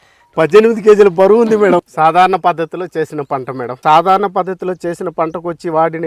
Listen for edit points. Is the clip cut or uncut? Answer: cut